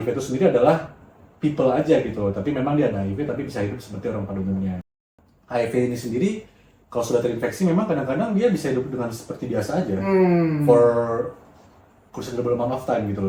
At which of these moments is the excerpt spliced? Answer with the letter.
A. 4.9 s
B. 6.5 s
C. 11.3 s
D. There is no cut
A